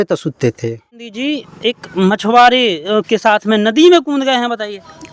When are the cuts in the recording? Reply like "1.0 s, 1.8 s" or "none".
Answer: 1.0 s

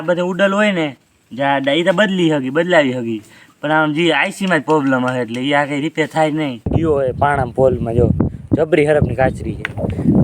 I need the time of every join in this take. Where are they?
6.7 s

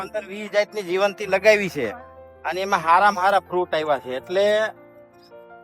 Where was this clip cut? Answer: none

